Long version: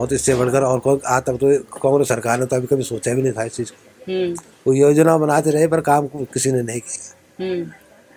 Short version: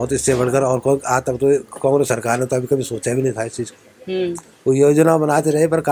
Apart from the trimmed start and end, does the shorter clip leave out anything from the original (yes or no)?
no